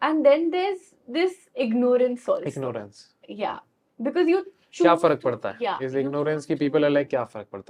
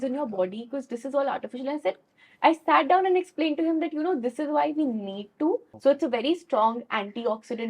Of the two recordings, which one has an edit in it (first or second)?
second